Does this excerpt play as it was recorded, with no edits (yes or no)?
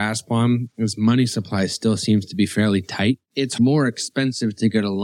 no